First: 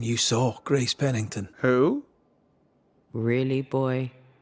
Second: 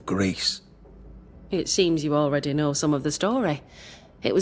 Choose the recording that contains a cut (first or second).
first